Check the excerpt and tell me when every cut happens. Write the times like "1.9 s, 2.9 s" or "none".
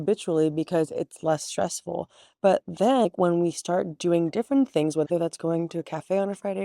5.1 s